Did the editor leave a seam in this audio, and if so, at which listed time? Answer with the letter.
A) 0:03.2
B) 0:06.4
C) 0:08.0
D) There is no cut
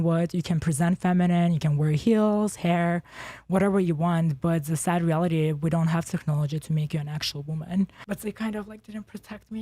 C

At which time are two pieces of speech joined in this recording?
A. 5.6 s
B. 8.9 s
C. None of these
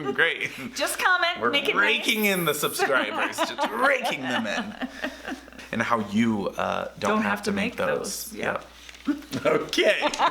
A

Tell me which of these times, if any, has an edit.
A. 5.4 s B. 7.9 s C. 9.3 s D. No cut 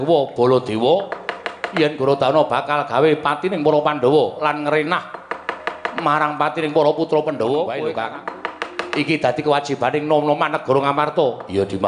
B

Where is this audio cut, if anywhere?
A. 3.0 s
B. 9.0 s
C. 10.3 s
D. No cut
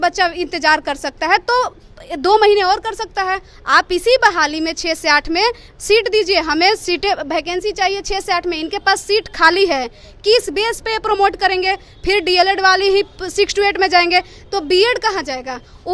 D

